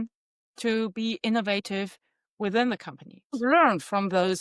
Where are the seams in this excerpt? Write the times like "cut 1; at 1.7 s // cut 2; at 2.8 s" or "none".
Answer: cut 1; at 3.4 s